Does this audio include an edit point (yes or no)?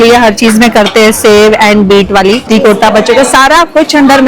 yes